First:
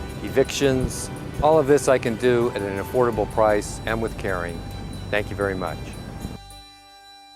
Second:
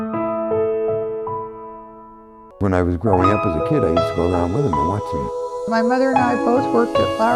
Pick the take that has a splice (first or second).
first